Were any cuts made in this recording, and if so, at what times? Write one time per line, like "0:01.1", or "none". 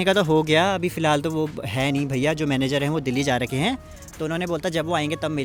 none